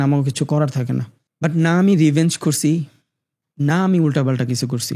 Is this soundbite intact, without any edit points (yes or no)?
no